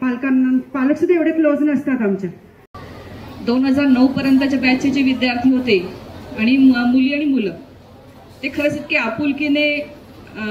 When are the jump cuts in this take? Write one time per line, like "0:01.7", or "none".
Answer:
0:02.6